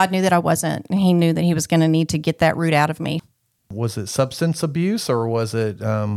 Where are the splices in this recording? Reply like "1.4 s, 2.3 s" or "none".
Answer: 3.2 s